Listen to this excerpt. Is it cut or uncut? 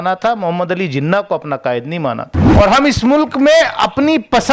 cut